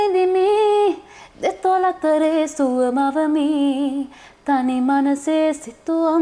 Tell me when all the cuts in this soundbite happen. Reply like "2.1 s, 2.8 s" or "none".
none